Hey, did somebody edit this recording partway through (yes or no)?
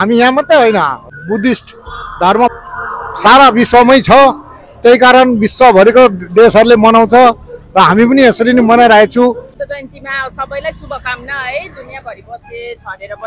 yes